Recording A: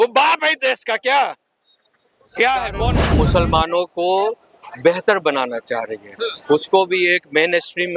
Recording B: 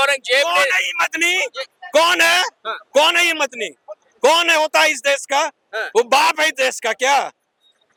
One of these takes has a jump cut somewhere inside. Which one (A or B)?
A